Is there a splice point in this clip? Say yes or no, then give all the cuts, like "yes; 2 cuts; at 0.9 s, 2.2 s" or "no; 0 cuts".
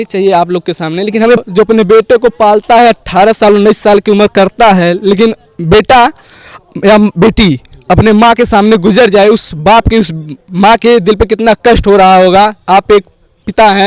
yes; 1 cut; at 1.4 s